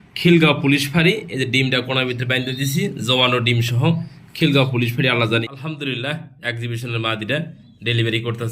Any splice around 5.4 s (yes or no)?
yes